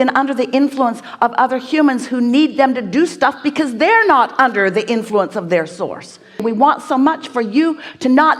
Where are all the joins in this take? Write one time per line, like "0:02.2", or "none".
0:06.4